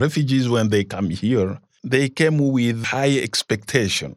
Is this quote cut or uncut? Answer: cut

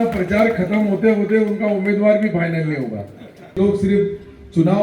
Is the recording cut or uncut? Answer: cut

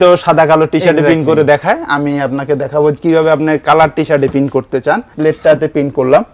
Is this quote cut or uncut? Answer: cut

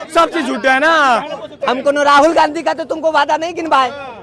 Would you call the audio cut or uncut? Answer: cut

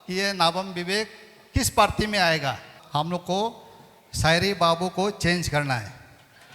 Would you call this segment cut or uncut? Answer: cut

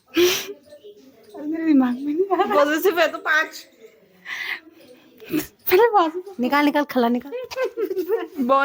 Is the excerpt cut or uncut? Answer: uncut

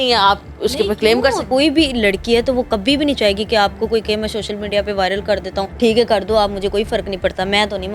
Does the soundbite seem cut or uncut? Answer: cut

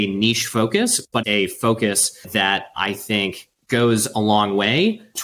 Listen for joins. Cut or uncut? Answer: cut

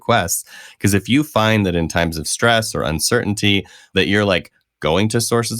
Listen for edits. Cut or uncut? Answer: cut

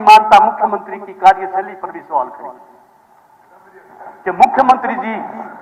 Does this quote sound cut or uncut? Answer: uncut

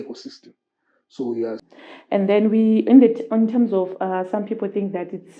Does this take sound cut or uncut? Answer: cut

